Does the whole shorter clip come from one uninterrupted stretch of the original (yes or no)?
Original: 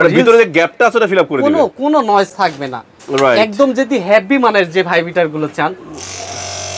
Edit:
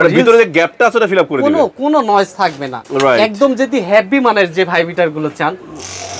no